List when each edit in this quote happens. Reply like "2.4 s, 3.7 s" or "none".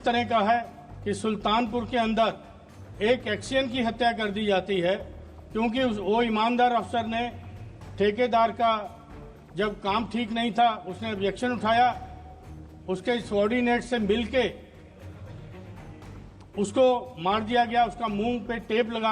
none